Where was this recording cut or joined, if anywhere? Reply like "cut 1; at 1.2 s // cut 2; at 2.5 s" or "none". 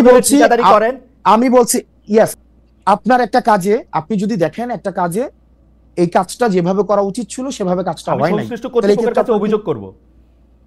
cut 1; at 2.3 s